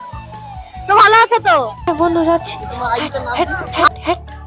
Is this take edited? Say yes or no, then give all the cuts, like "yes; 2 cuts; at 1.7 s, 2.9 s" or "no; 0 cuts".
yes; 1 cut; at 1.9 s